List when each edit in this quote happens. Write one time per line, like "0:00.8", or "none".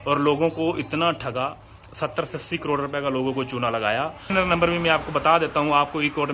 0:04.3